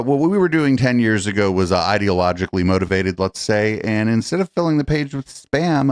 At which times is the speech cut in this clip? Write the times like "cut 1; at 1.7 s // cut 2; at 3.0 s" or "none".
none